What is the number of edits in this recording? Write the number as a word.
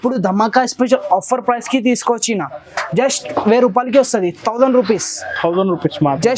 zero